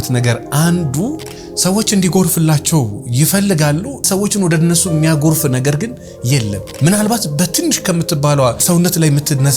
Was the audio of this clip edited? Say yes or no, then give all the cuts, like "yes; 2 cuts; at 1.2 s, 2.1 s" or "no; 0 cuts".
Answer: yes; 3 cuts; at 4.1 s, 6.6 s, 8.6 s